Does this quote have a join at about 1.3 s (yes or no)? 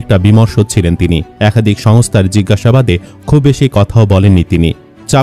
yes